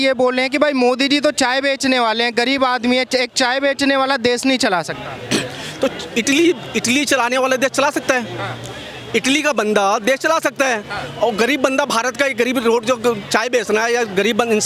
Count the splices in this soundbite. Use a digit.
0